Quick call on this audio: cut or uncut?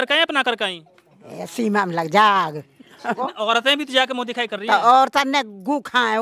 cut